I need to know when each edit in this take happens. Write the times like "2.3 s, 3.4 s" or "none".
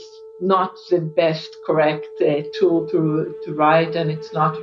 none